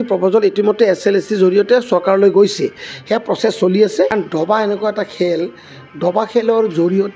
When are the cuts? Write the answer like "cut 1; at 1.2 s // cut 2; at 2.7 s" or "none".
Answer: cut 1; at 4.1 s